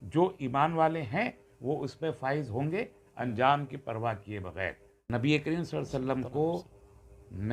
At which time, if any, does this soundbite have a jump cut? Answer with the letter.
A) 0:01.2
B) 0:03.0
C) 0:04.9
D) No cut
C